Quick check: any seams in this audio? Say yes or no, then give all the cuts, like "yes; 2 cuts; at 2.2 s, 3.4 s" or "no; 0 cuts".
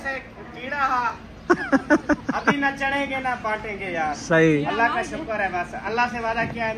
no; 0 cuts